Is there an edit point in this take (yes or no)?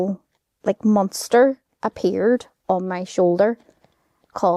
no